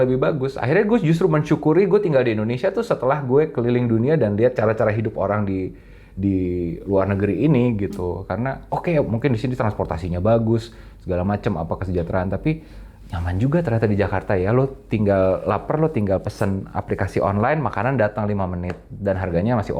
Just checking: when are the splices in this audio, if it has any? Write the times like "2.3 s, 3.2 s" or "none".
none